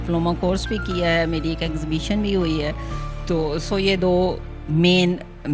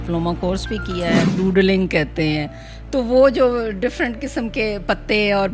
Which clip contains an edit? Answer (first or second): second